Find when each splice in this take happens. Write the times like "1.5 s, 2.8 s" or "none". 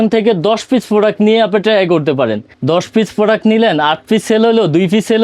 2.5 s

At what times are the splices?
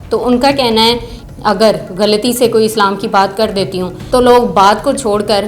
1.1 s, 3.9 s

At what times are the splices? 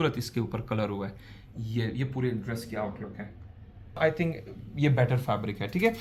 4.0 s

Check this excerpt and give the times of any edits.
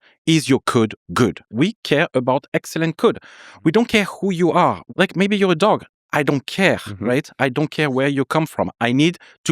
1.5 s, 4.8 s

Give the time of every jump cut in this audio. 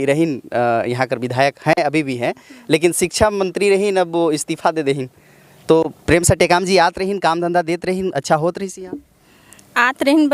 none

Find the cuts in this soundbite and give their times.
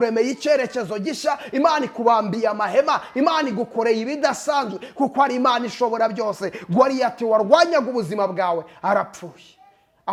none

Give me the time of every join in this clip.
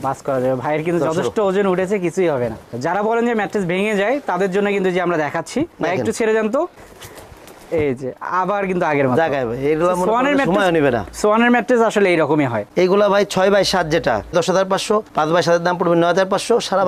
none

